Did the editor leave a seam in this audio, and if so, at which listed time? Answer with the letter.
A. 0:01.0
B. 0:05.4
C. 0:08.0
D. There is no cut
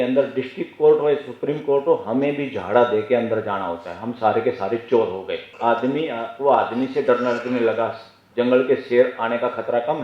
B